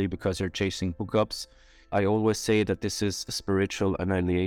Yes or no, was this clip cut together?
yes